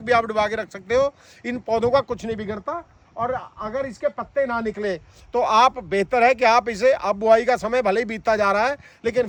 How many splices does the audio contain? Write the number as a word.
zero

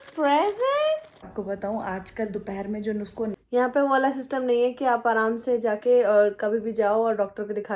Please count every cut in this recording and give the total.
two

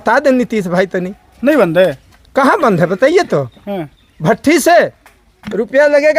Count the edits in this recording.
zero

